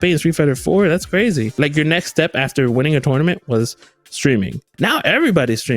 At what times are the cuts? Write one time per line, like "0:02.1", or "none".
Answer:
0:01.6
0:04.6

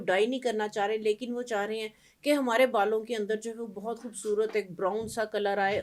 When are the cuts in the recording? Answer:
none

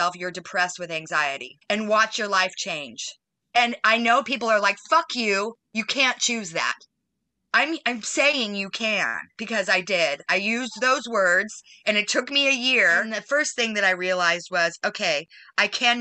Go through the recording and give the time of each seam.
0:01.5
0:13.1

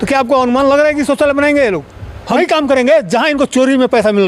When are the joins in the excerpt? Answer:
none

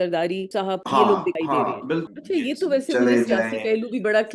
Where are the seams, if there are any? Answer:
0:02.1

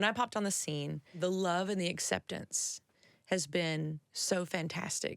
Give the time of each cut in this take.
0:01.2

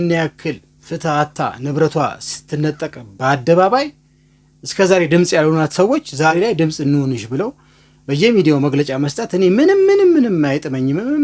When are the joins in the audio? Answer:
0:06.3

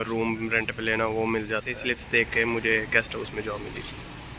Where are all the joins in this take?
0:01.8

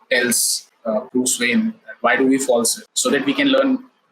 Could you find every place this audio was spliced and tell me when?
0:02.8

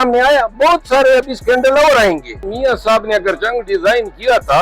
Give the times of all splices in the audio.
0:02.5

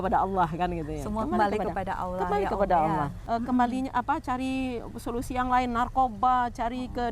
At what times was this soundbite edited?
0:03.2

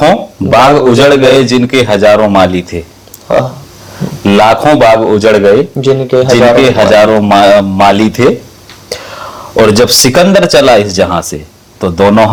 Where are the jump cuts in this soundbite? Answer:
none

